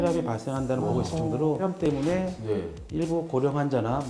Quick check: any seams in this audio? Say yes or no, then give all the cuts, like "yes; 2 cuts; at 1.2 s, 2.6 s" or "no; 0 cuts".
yes; 1 cut; at 1.9 s